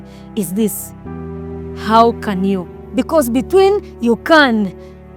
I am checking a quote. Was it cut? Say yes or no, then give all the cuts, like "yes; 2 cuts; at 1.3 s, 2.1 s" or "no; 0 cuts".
yes; 1 cut; at 2.8 s